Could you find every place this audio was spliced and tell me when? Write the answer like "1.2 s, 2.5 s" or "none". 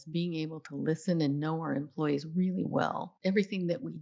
3.1 s